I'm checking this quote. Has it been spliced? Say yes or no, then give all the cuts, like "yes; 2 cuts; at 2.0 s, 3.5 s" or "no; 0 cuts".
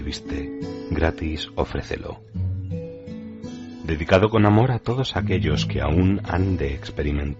yes; 2 cuts; at 2.2 s, 3.8 s